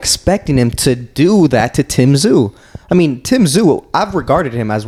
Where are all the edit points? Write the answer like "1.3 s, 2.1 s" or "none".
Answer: none